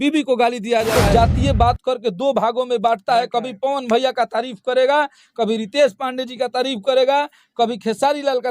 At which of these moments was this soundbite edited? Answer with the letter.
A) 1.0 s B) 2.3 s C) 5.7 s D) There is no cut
A